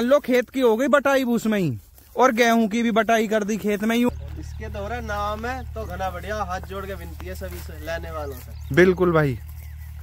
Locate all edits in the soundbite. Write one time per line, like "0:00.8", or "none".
0:04.1

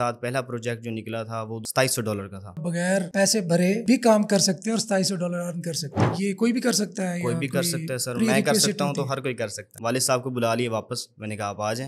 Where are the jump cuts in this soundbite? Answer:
0:01.6
0:02.6
0:06.1
0:09.7

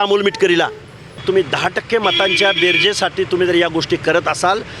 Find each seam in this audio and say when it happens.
0:01.2

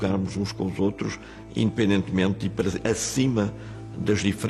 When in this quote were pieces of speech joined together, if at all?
none

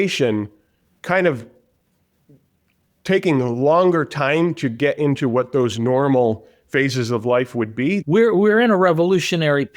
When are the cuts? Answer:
0:08.0

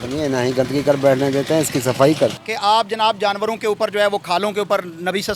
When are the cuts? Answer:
0:02.3

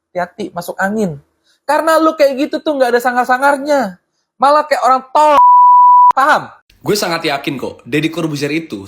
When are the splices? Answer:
0:06.6

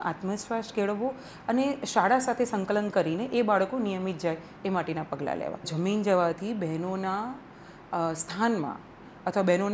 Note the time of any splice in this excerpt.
0:05.7

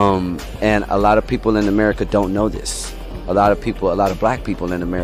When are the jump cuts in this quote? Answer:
none

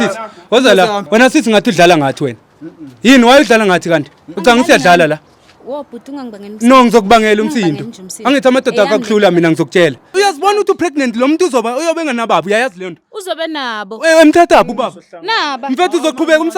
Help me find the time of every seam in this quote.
0:01.0
0:10.0

